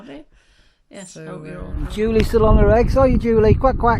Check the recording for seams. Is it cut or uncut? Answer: cut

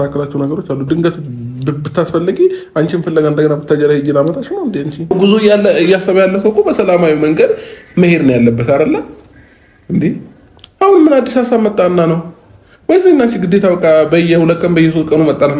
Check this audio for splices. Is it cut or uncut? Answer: cut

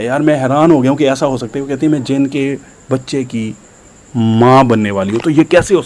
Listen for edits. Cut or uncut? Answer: uncut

